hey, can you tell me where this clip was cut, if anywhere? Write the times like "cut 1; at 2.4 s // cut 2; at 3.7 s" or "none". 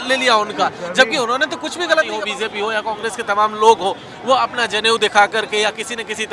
cut 1; at 2.2 s